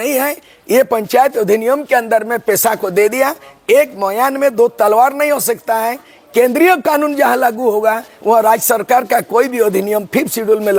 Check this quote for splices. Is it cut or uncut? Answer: uncut